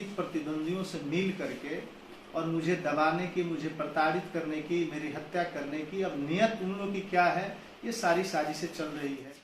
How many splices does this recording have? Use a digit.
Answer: 0